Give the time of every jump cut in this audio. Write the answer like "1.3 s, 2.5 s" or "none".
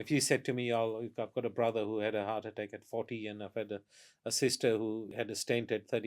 5.1 s